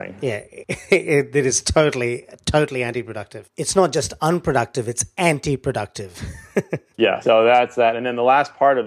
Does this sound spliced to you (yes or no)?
no